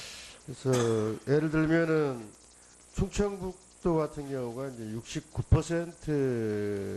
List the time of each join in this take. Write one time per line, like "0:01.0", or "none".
0:02.9